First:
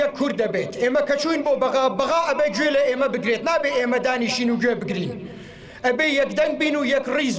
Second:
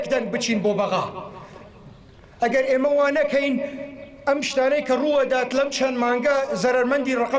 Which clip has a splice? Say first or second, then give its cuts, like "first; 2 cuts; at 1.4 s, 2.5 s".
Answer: first; 1 cut; at 1.8 s